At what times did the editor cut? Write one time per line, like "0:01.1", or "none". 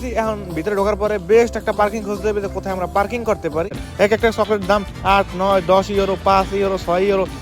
0:03.9